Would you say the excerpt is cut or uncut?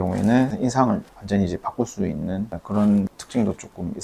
uncut